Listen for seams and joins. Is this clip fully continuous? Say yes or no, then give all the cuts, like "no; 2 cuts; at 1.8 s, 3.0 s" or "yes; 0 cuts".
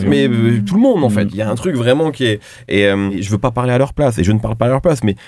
no; 1 cut; at 3.2 s